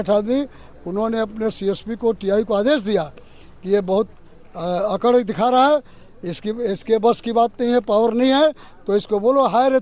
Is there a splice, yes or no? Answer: no